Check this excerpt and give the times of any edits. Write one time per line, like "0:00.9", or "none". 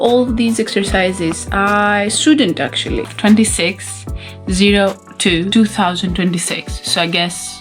0:03.0